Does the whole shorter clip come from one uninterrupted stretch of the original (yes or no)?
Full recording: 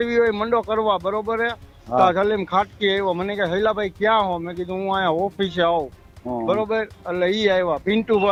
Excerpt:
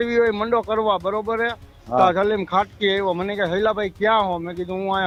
yes